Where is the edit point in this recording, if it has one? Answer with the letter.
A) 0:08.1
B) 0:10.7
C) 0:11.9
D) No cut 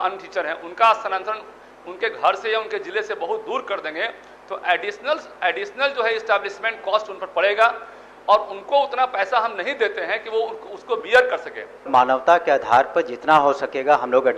C